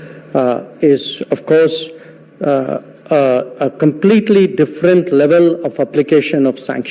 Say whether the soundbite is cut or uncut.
uncut